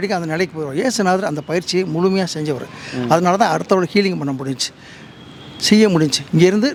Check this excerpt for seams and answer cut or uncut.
uncut